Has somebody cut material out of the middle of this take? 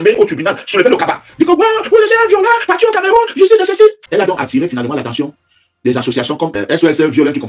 yes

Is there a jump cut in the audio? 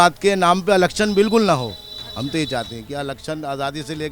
no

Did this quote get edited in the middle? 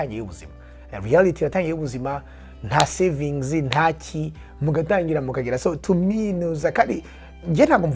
no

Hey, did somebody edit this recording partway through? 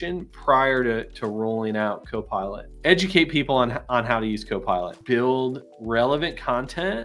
yes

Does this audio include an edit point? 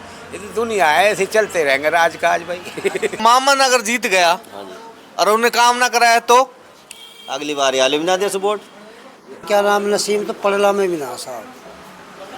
yes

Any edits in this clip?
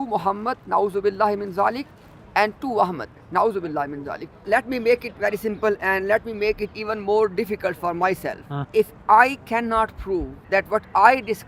yes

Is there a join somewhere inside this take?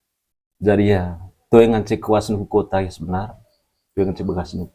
no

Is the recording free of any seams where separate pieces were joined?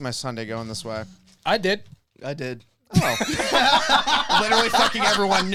yes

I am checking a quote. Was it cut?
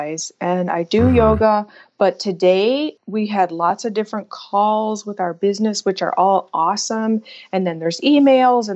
yes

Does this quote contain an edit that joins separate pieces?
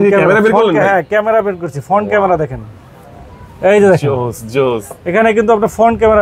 no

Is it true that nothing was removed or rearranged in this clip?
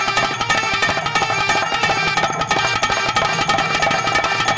yes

